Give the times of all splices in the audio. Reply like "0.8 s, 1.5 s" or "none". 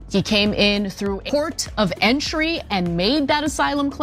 1.2 s